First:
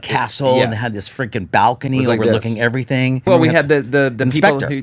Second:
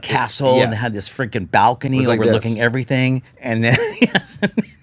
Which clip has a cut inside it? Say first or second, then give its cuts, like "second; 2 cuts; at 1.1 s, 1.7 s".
first; 1 cut; at 3.2 s